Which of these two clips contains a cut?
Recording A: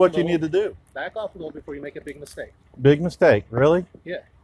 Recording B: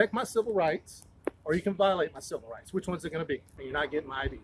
B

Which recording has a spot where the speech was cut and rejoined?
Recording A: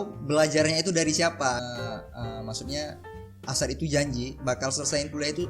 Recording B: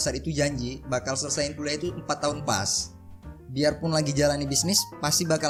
A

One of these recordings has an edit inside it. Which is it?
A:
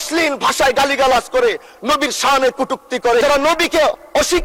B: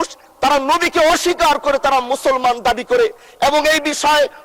A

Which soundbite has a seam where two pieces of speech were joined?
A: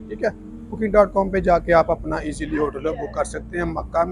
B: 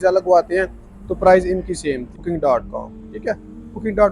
B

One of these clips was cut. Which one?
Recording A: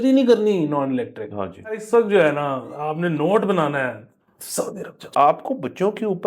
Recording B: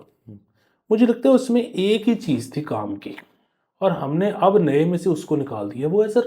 A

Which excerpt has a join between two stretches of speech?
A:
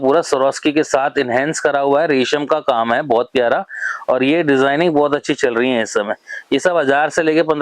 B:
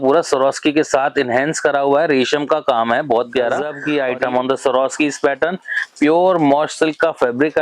B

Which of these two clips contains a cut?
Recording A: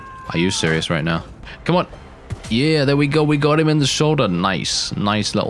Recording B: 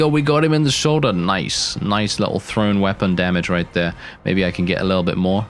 A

